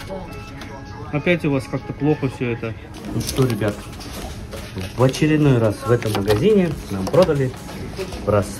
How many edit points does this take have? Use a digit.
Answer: 1